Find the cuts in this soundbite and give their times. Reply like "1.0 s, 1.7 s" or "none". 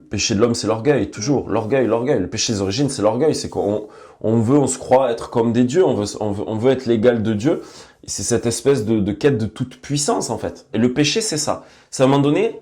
10.6 s